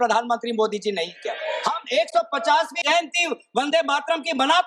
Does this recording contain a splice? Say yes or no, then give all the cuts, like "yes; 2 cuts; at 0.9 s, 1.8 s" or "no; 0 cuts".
yes; 2 cuts; at 1.4 s, 2.8 s